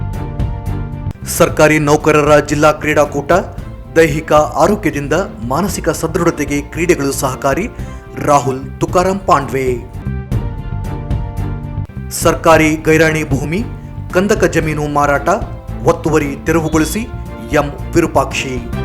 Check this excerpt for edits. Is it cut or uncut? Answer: cut